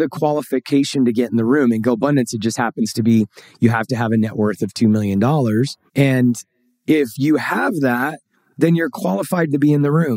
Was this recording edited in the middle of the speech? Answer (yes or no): no